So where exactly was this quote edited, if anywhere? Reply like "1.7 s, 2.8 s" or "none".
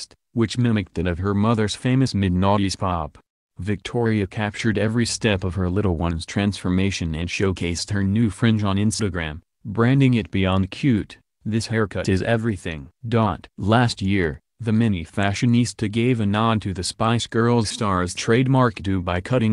13.5 s